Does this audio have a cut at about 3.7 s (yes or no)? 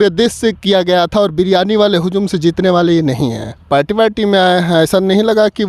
yes